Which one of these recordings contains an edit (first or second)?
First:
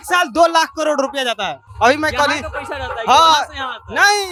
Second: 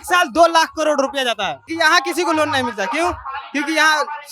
second